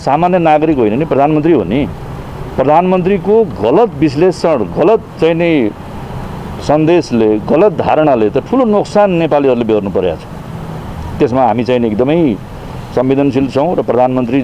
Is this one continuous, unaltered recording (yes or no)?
yes